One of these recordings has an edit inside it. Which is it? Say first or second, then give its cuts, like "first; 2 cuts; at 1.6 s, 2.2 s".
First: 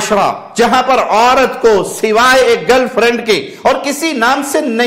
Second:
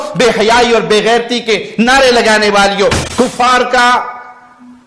second; 1 cut; at 3.0 s